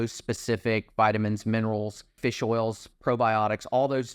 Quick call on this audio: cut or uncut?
cut